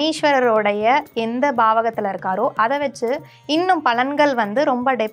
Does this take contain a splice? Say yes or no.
no